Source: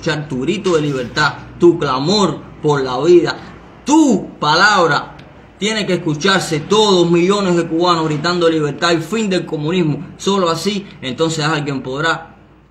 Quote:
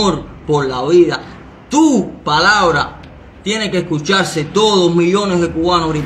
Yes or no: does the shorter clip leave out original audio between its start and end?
no